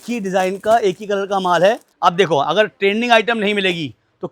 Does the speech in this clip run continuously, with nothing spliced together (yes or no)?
no